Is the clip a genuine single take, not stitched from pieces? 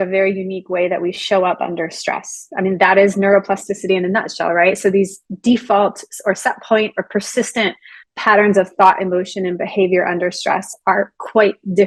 yes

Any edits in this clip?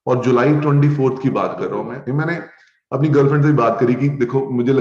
yes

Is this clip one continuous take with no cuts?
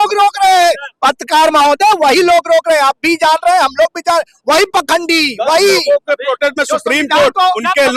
yes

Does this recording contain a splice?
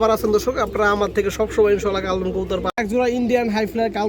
yes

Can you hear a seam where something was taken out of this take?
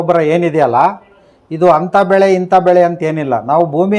no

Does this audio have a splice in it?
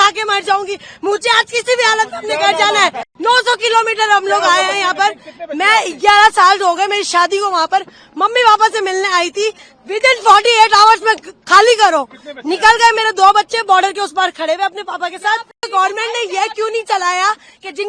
yes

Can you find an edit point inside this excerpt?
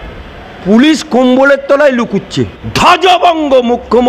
yes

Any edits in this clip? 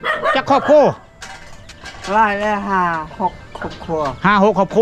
no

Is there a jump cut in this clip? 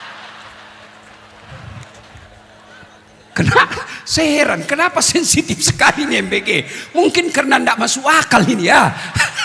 no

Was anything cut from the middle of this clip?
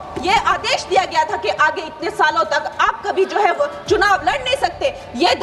no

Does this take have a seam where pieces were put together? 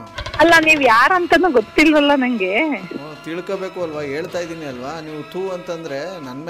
no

